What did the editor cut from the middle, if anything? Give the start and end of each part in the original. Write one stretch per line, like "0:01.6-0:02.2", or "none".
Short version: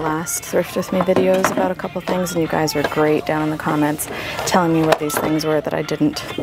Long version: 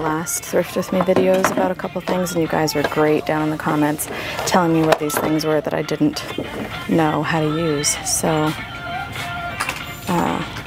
none